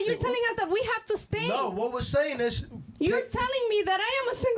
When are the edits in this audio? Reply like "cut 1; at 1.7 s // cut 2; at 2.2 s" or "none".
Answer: cut 1; at 1.5 s